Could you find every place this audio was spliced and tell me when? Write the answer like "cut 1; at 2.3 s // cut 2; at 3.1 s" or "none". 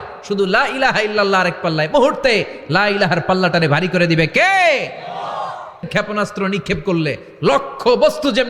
cut 1; at 5.9 s